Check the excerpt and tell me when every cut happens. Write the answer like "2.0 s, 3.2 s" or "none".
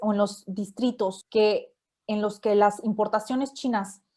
1.2 s